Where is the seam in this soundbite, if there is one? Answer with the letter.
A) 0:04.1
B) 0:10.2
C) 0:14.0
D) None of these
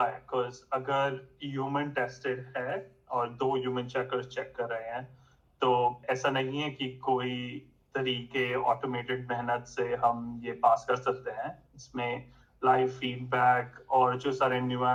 D